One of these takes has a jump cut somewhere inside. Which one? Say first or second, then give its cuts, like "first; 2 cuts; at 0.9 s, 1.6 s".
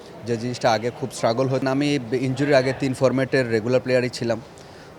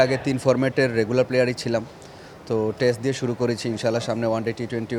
first; 1 cut; at 1.6 s